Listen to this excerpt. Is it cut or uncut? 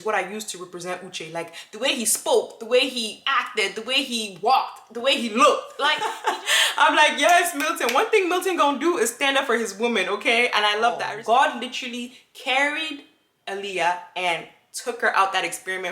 cut